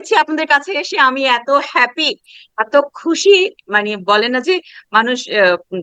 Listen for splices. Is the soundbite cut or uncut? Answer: uncut